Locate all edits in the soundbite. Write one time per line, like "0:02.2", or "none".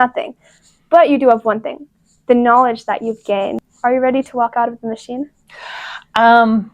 0:03.6